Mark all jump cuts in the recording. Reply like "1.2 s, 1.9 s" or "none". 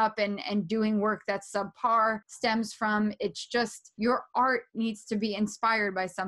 2.3 s, 3.8 s